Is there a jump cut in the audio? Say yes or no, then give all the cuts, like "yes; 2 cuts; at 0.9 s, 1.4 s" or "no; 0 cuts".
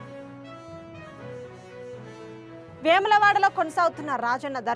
yes; 1 cut; at 1.0 s